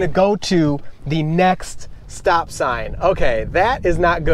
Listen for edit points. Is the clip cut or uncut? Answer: uncut